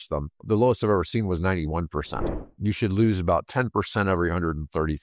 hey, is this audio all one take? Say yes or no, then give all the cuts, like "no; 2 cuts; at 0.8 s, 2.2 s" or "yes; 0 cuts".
no; 1 cut; at 2.5 s